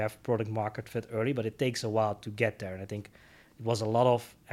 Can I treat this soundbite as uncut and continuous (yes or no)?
yes